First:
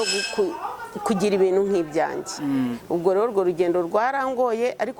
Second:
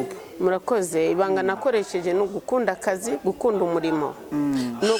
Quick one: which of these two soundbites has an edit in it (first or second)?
first